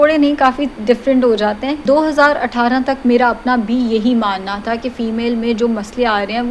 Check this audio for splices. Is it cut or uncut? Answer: cut